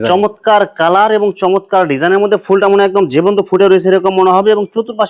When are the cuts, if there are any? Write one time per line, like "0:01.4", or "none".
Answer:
none